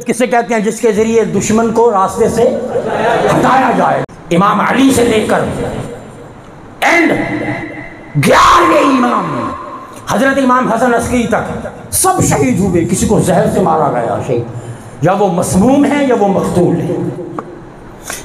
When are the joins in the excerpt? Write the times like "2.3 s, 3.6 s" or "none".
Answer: 4.0 s